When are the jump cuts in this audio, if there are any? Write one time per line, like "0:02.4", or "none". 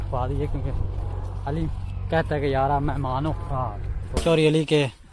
0:04.2